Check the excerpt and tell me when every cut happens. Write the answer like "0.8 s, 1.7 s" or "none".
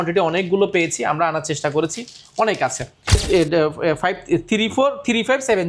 3.2 s